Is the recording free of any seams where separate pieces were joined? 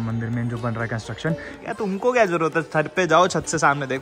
no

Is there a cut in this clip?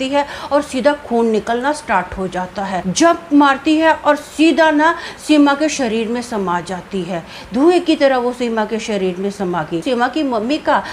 yes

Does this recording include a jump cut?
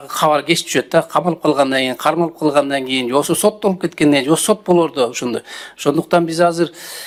no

